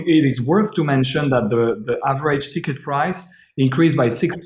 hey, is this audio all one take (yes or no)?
yes